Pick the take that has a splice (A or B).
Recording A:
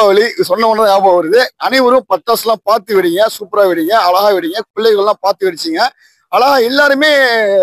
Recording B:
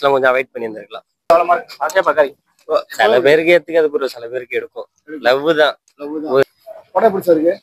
B